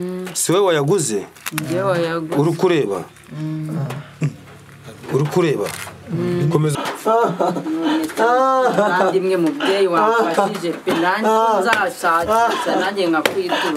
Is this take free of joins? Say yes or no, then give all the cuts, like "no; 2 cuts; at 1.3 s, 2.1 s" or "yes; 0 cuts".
no; 1 cut; at 6.7 s